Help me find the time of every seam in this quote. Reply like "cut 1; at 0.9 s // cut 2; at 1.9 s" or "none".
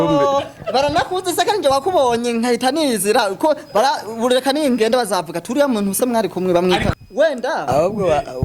cut 1; at 6.9 s